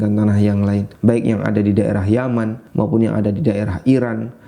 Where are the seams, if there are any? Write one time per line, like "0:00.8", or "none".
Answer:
0:00.9
0:02.6